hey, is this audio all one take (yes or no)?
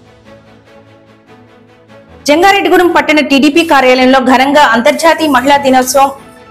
yes